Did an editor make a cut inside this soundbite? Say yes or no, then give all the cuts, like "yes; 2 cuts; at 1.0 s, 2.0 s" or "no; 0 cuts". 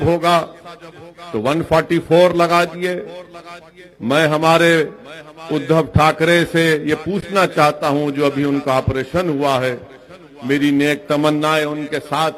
no; 0 cuts